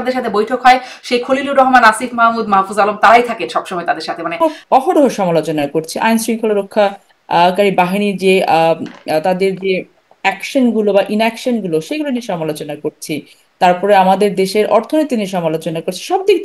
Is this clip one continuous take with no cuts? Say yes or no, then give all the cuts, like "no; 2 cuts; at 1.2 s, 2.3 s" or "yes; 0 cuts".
no; 1 cut; at 4.4 s